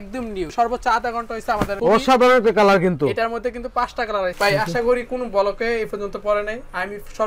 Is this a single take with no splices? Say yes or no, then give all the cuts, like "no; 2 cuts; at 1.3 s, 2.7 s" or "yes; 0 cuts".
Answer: no; 1 cut; at 4.3 s